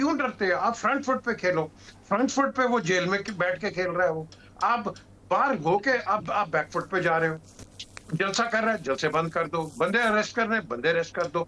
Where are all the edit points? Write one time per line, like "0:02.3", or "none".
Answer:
none